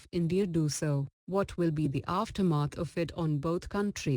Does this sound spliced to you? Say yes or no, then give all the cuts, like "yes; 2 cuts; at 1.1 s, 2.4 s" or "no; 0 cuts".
yes; 1 cut; at 1.1 s